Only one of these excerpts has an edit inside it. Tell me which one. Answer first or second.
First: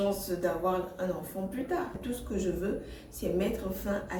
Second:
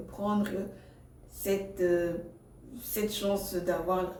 first